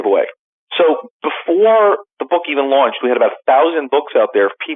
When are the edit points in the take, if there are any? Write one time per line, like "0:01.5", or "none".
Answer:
0:02.1